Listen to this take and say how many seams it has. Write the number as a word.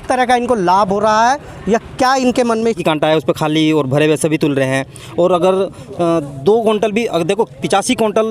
one